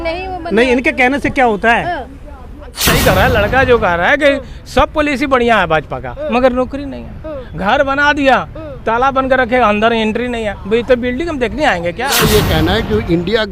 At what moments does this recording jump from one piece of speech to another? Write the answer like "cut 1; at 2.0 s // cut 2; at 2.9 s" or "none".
cut 1; at 2.8 s // cut 2; at 12.0 s